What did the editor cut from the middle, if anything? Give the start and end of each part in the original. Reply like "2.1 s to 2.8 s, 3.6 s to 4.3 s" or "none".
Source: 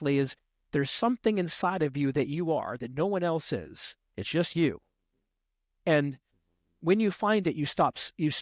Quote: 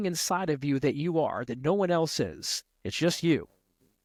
none